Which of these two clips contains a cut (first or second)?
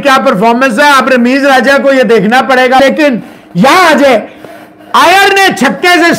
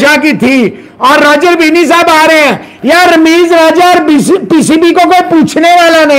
first